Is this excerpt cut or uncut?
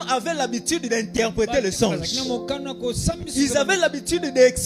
uncut